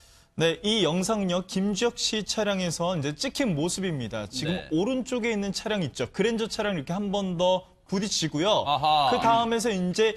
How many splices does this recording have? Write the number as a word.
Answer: zero